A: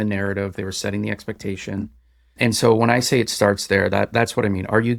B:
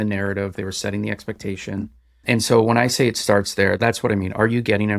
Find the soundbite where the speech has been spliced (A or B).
B